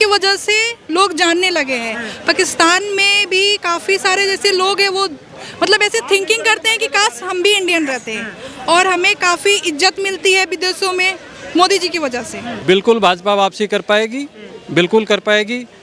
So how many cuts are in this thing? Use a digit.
1